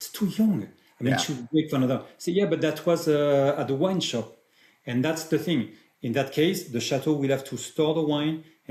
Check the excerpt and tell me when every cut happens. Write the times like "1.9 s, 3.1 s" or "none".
none